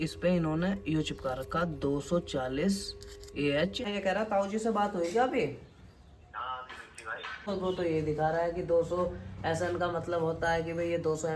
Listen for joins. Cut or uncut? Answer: cut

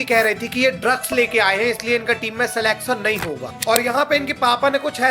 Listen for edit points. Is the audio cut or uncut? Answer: cut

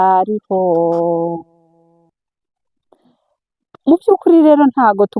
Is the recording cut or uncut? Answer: uncut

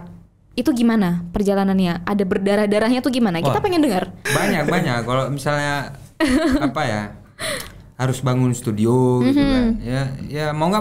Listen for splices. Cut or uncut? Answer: cut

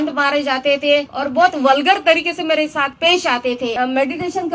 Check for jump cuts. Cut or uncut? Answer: cut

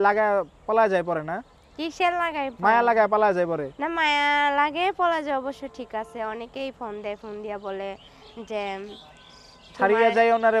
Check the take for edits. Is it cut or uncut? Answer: uncut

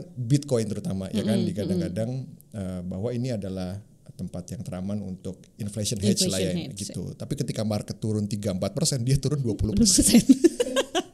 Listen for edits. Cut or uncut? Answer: uncut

